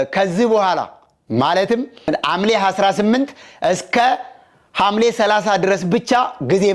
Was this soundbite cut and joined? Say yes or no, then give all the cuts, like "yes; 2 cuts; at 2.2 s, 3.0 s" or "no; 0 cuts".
no; 0 cuts